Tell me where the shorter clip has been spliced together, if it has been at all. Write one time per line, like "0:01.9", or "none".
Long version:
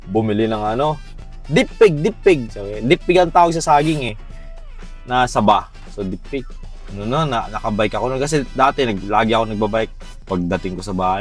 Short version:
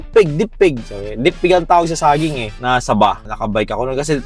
0:02.5
0:03.3

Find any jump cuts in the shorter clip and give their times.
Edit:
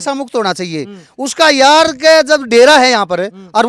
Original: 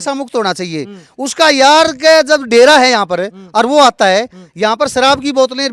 none

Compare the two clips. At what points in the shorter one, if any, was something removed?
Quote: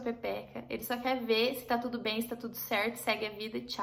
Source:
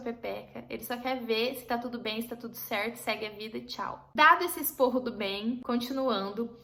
none

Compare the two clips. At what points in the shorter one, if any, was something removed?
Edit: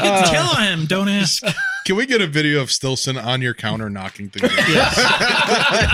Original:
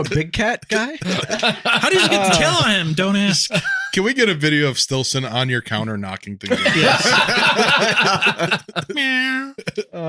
none

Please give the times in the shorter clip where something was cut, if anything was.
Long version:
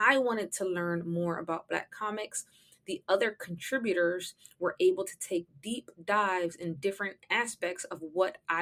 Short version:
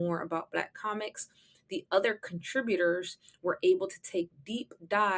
none

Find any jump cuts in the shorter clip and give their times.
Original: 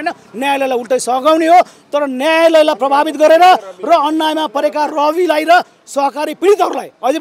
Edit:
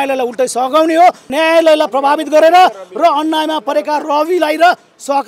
0:01.3

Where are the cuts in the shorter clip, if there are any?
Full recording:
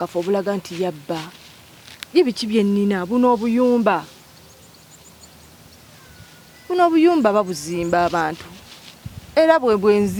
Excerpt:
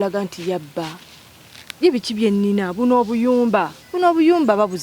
0:03.8

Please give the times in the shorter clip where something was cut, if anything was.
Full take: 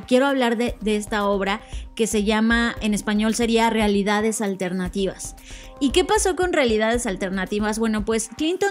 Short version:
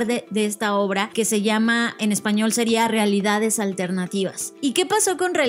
0:01.1
0:04.4

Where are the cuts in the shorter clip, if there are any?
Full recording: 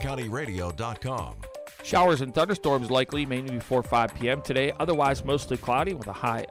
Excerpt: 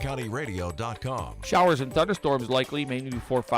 0:01.4

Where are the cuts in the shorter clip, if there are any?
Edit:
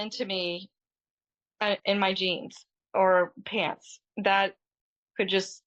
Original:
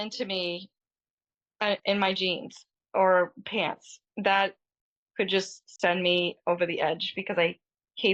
none

